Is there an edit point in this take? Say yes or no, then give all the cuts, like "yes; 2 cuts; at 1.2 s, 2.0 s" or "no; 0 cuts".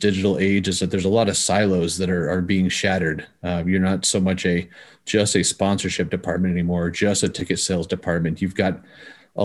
no; 0 cuts